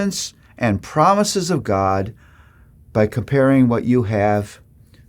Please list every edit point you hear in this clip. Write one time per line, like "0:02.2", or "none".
none